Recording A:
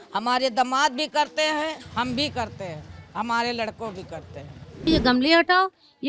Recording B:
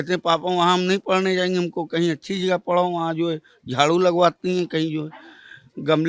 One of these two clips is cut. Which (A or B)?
A